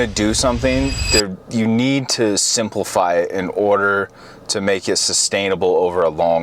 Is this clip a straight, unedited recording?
yes; 0 cuts

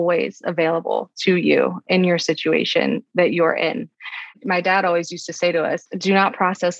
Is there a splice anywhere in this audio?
no; 0 cuts

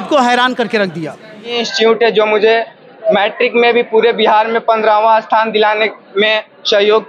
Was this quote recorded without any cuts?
no; 1 cut; at 1.6 s

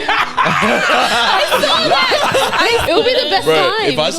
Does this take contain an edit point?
yes; 1 cut; at 2.8 s

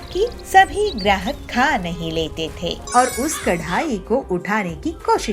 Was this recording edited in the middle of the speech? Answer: yes; 1 cut; at 2.8 s

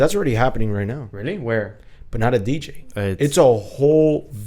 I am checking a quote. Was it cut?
no; 0 cuts

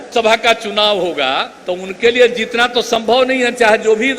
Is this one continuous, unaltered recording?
no; 1 cut; at 1.5 s

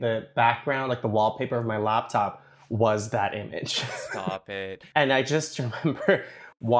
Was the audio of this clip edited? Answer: yes; 1 cut; at 4.4 s

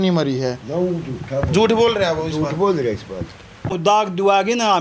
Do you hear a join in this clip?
yes; 1 cut; at 3.8 s

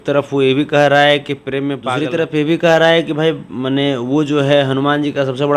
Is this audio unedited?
no; 1 cut; at 1.9 s

